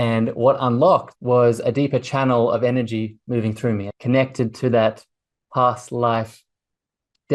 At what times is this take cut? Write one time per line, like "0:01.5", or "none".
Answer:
0:01.1
0:03.9